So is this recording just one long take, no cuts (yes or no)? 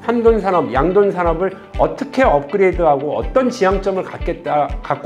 yes